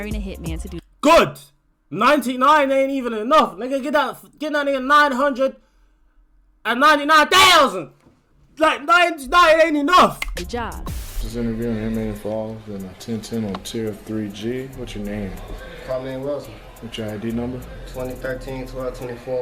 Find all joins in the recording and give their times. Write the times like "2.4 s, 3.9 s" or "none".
none